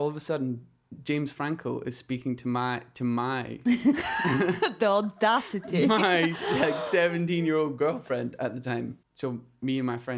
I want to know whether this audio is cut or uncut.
cut